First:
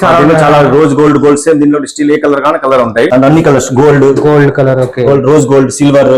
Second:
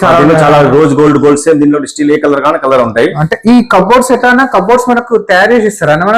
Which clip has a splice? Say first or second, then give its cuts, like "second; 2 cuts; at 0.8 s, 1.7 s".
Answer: first; 1 cut; at 3.1 s